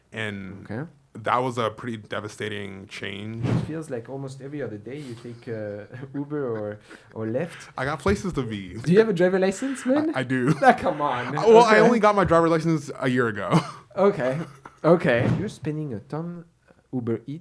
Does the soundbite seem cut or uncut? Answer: cut